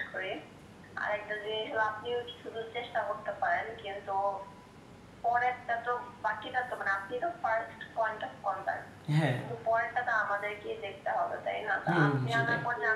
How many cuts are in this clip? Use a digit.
0